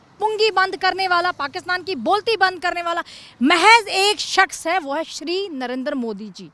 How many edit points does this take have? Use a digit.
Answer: 0